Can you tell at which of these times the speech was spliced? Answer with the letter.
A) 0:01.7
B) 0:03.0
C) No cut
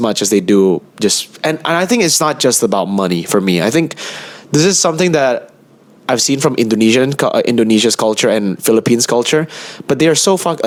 C